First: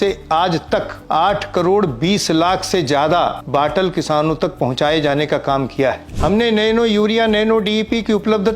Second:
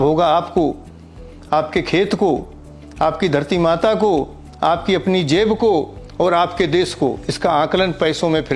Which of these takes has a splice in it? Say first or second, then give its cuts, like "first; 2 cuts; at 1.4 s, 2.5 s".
first; 3 cuts; at 0.9 s, 3.4 s, 6.1 s